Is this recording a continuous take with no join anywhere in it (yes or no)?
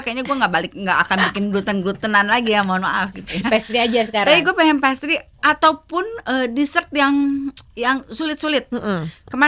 yes